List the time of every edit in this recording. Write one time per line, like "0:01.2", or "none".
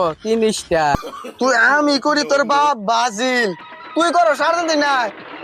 0:00.9